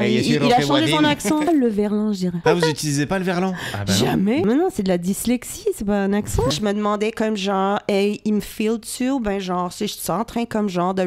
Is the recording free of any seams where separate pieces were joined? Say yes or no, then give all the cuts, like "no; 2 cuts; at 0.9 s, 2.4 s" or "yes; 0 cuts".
no; 4 cuts; at 1.5 s, 2.4 s, 4.4 s, 6.5 s